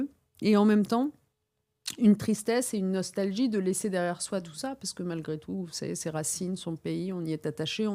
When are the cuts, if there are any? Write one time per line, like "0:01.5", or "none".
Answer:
none